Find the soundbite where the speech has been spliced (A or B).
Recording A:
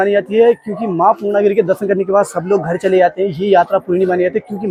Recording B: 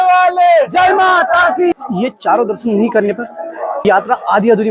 B